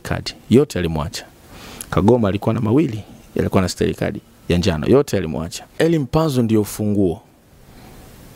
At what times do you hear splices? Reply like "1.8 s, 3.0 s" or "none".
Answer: 5.7 s